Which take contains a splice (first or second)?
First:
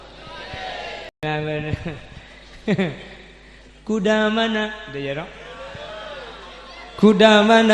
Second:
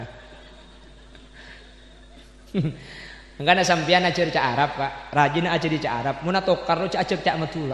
first